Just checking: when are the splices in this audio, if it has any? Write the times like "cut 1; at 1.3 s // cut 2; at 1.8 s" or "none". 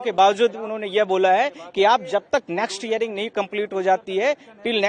none